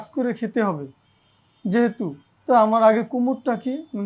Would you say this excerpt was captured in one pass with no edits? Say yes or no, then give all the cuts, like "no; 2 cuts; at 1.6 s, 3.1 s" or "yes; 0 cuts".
yes; 0 cuts